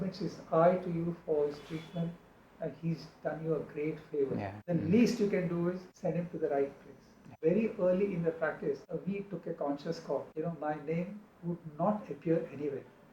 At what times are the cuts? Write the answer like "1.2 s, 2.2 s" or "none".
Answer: 4.6 s, 5.9 s, 7.3 s, 8.8 s, 10.3 s

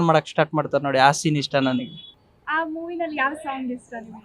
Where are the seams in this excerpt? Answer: none

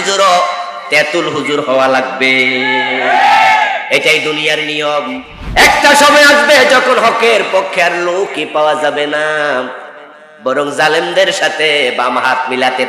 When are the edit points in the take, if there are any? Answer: 5.3 s

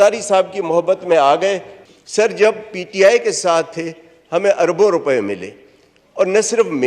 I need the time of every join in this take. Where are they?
1.7 s

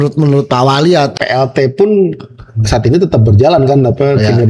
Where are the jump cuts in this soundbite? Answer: 1.1 s

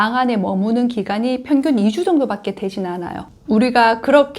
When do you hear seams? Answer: 3.3 s

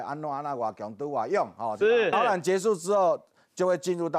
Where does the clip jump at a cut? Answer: 2.1 s

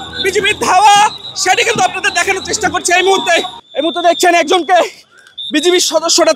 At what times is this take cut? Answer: 3.6 s

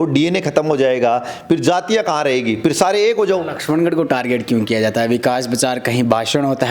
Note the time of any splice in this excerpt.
3.5 s

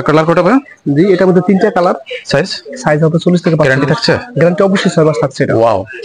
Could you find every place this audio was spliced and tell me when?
none

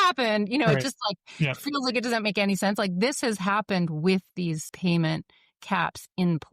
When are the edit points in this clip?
4.7 s

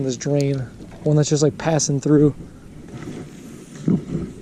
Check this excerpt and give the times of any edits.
none

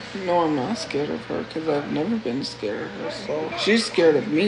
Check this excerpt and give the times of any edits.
3.5 s

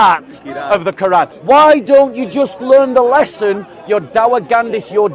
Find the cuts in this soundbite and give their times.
1.3 s

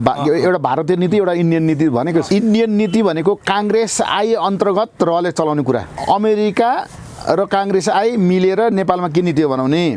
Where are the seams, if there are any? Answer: 2.2 s, 5.9 s

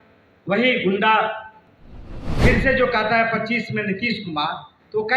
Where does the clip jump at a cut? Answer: 2.0 s

